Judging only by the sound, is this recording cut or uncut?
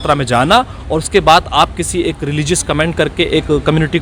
uncut